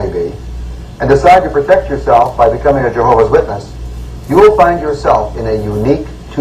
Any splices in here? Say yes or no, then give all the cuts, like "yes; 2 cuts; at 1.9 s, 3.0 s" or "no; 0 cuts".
yes; 1 cut; at 2.8 s